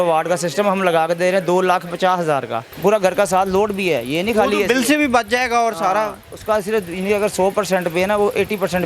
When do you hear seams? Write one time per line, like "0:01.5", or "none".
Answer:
0:02.6

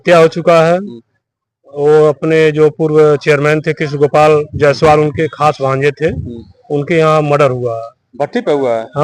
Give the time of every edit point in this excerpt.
none

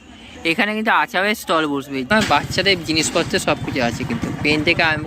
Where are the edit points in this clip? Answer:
0:02.1

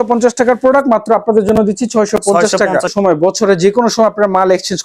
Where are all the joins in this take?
0:02.9

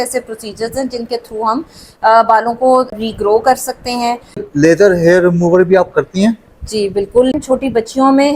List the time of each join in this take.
0:02.9
0:04.5
0:07.3

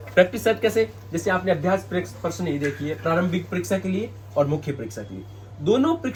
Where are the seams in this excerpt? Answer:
none

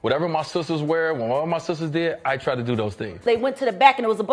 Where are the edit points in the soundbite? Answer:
0:03.3

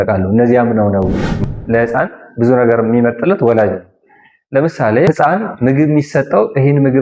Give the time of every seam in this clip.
0:01.4
0:05.1

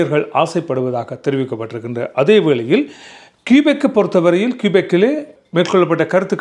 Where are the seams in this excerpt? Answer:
none

